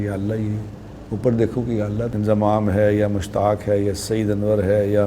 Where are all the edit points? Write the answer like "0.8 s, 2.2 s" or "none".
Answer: 2.1 s